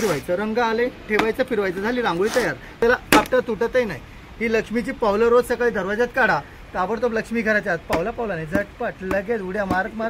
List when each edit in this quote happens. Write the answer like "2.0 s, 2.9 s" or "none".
2.8 s